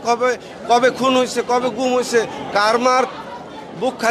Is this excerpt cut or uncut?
uncut